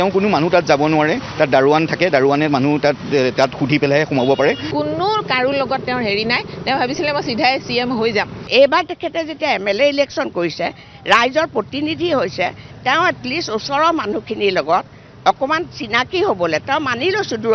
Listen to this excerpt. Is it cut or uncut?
cut